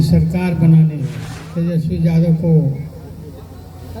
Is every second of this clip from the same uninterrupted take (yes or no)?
yes